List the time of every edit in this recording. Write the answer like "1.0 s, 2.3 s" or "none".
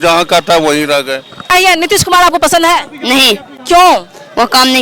1.5 s